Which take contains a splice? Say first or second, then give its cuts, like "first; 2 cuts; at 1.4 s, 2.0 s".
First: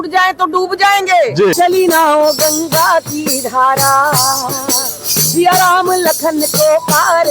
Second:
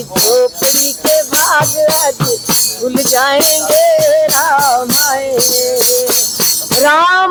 first; 1 cut; at 1.5 s